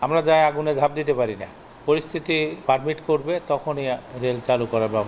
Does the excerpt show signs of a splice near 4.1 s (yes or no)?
yes